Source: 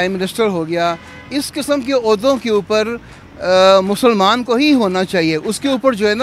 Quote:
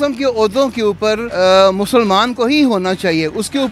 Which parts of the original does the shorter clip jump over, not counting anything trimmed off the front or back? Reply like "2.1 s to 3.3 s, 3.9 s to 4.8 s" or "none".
2.9 s to 3.4 s